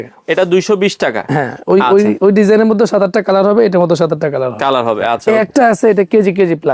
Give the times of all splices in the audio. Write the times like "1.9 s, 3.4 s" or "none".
5.2 s